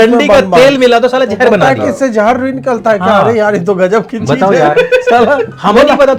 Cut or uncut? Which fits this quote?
uncut